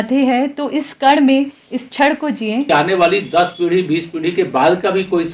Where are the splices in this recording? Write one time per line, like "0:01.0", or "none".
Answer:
0:02.7

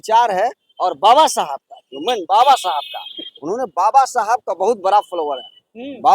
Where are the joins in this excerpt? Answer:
none

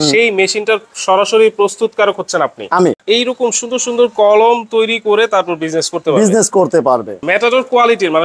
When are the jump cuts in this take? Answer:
0:03.0
0:07.2

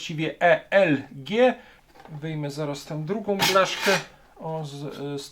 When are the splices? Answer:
0:01.7

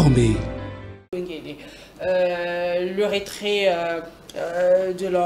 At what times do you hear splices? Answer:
0:01.1

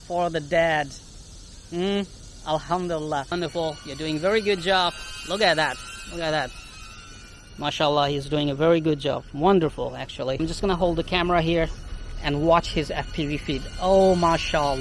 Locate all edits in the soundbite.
0:03.3
0:10.4

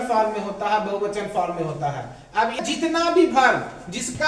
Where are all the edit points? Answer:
0:02.6

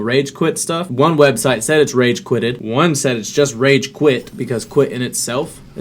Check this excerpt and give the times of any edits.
0:00.9
0:02.6
0:04.3

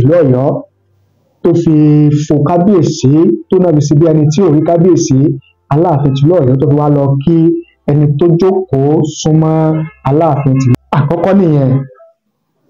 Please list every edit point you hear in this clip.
0:10.7

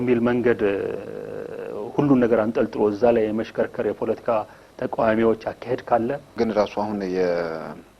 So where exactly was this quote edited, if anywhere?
0:06.2

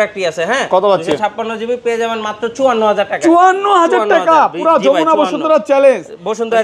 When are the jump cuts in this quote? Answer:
none

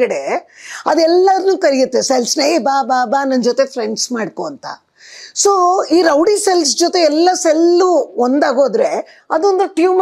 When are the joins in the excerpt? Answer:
none

